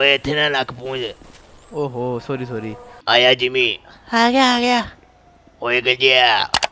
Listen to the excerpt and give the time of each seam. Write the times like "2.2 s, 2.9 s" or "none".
3.0 s